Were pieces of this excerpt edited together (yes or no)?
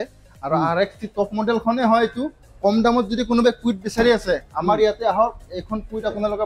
yes